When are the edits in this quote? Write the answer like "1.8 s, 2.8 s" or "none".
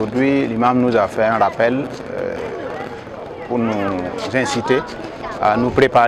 none